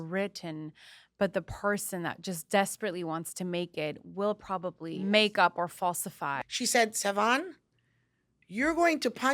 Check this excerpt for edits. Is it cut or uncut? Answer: cut